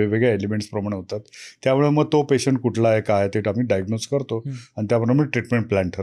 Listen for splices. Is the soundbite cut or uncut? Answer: uncut